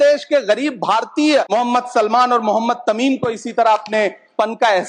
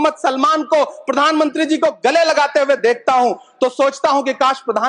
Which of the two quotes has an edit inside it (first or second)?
first